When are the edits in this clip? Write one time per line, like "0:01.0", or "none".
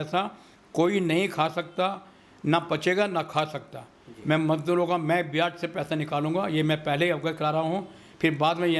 none